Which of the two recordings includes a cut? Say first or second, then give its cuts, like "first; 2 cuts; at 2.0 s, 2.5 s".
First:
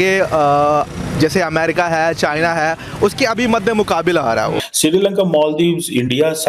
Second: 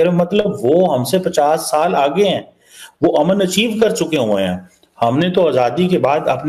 first; 1 cut; at 4.7 s